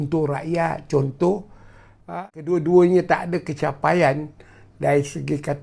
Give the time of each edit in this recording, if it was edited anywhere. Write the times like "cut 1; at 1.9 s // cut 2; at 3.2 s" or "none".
cut 1; at 2.0 s